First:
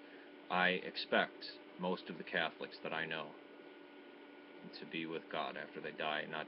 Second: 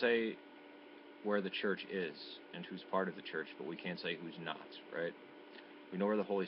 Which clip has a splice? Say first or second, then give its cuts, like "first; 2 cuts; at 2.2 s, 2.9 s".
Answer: second; 1 cut; at 2.1 s